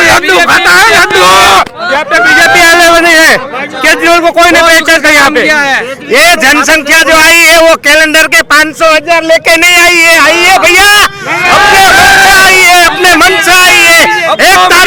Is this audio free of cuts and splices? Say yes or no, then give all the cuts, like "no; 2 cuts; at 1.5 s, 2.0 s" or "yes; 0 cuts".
yes; 0 cuts